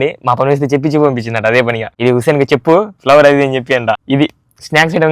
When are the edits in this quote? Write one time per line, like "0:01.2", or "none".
0:01.9
0:04.0